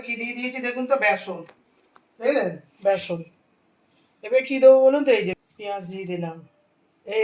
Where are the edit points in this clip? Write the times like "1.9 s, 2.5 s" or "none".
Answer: 5.4 s